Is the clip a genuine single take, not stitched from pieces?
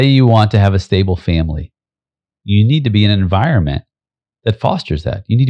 yes; 0 cuts

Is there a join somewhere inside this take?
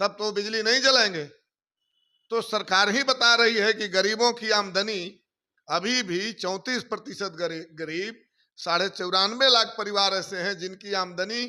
no; 0 cuts

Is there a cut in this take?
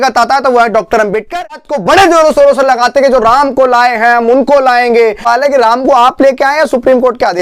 yes; 2 cuts; at 1.7 s, 5.2 s

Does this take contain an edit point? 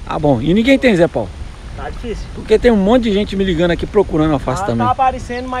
no; 0 cuts

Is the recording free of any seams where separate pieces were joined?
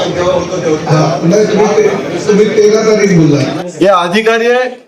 no; 1 cut; at 3.5 s

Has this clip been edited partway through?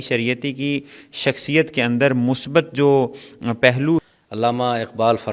yes; 1 cut; at 4.0 s

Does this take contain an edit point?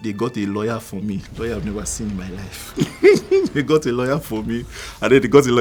no; 0 cuts

